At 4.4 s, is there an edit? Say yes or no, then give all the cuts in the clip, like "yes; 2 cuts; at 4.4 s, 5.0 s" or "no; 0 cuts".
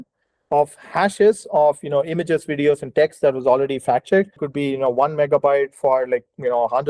yes; 1 cut; at 4.4 s